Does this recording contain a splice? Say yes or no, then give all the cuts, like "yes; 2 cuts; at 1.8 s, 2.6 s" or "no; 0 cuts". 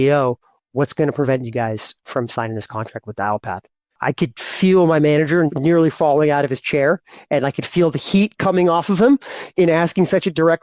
yes; 2 cuts; at 4.0 s, 5.5 s